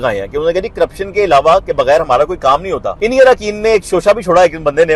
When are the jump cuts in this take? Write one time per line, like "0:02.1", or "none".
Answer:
0:02.9